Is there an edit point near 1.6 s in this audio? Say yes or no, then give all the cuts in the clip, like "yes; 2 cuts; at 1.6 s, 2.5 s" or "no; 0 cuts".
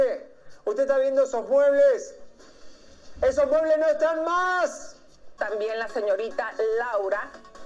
no; 1 cut; at 5.3 s